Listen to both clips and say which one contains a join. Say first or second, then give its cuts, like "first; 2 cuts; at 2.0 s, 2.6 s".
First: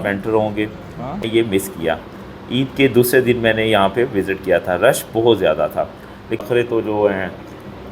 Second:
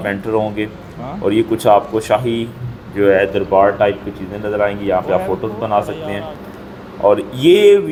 first; 2 cuts; at 1.2 s, 6.3 s